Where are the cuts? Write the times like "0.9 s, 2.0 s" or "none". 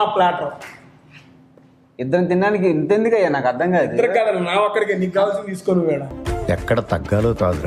none